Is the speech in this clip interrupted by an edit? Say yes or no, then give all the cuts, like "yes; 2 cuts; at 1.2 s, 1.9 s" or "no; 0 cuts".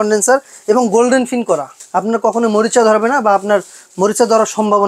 yes; 1 cut; at 1.8 s